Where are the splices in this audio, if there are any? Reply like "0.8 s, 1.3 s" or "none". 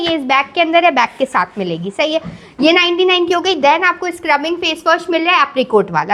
none